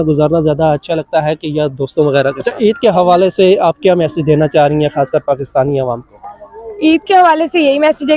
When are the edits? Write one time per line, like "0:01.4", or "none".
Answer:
0:02.4